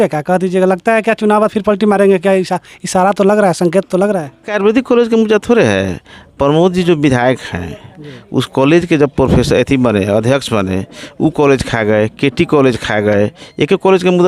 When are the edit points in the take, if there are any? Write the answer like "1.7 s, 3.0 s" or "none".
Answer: 4.5 s